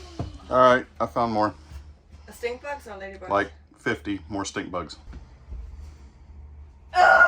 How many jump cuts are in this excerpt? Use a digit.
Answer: 1